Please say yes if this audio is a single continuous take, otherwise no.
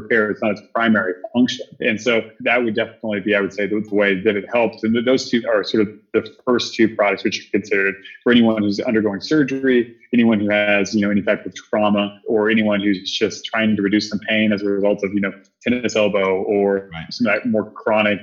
yes